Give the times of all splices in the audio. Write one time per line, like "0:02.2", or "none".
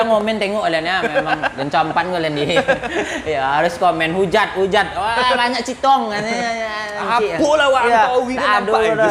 none

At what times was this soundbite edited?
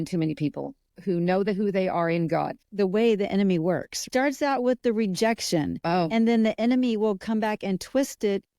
0:00.9
0:02.6
0:04.0

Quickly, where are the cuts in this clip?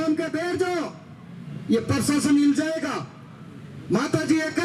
none

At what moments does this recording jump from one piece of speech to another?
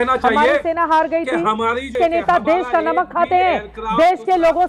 0:01.9

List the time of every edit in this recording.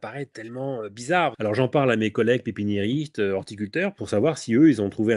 0:01.4
0:04.0

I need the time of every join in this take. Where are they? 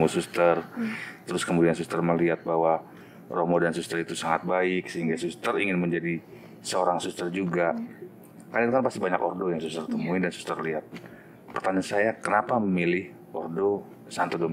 none

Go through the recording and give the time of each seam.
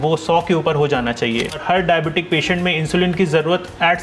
0:01.6

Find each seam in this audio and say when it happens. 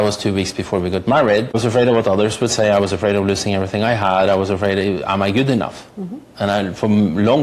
0:01.6

